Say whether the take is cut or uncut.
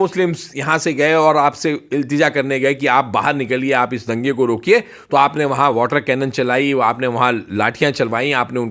uncut